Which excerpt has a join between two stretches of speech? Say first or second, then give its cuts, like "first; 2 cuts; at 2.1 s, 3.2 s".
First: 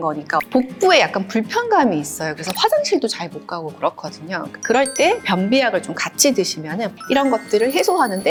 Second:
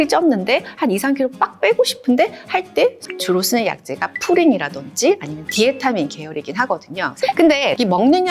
second; 2 cuts; at 3.0 s, 7.0 s